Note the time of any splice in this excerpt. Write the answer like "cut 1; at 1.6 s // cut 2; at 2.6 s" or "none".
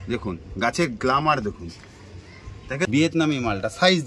cut 1; at 3.0 s